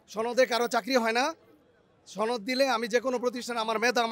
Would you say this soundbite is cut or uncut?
uncut